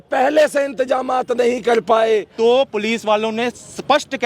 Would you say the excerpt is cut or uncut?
cut